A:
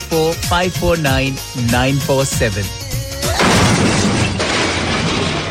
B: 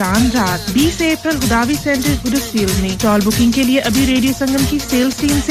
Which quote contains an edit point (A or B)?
A